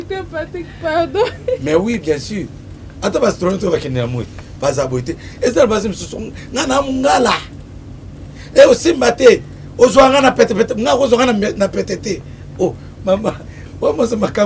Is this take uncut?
yes; 0 cuts

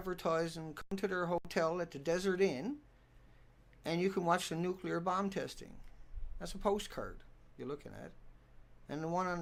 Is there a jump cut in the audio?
no; 0 cuts

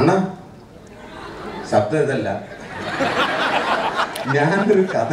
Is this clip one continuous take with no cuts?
yes; 0 cuts

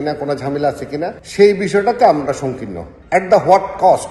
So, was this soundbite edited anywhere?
yes; 2 cuts; at 1.2 s, 2.9 s

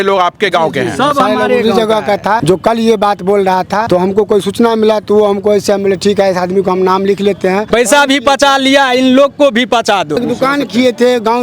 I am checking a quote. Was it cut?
yes; 4 cuts; at 2.4 s, 3.8 s, 7.7 s, 10.2 s

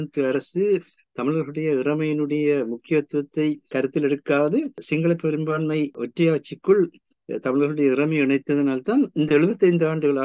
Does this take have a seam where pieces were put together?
yes; 3 cuts; at 3.7 s, 4.8 s, 6.0 s

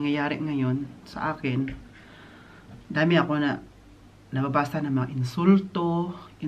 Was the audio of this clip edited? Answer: no; 0 cuts

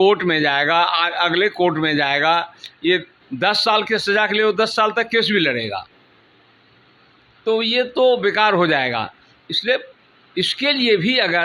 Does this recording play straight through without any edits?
yes; 0 cuts

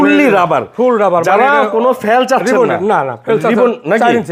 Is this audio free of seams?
yes; 0 cuts

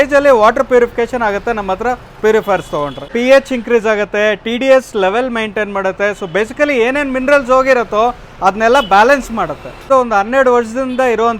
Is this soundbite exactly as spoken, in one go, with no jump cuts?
yes; 0 cuts

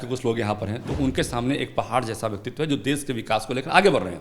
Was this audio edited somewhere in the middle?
no; 0 cuts

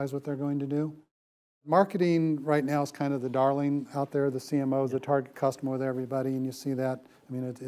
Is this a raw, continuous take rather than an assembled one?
no; 1 cut; at 1.6 s

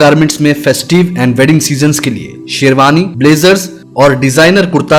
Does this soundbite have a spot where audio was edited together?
no; 0 cuts

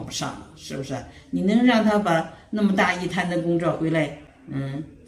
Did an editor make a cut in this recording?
no; 0 cuts

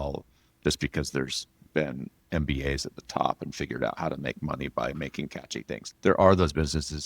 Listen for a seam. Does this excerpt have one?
yes; 1 cut; at 5.8 s

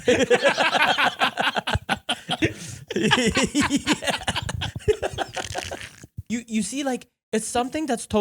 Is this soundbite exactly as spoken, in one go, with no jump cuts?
no; 2 cuts; at 2.4 s, 6.1 s

